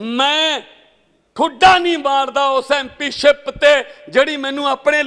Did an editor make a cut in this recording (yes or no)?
no